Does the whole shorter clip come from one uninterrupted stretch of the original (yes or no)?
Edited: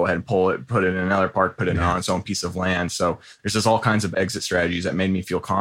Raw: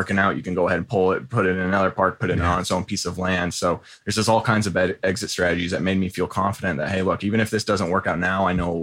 no